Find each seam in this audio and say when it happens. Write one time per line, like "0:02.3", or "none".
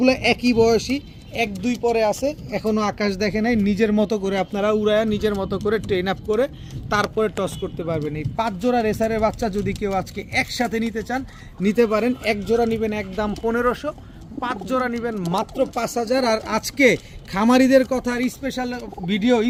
none